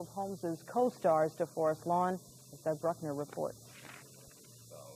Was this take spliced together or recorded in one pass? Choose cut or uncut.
cut